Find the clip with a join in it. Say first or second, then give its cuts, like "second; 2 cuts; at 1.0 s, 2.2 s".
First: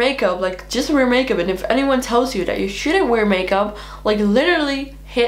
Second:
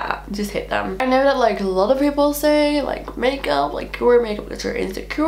second; 1 cut; at 1.0 s